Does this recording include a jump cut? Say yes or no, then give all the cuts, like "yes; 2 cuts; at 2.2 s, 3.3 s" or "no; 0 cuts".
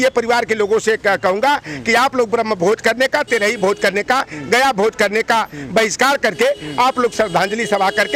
no; 0 cuts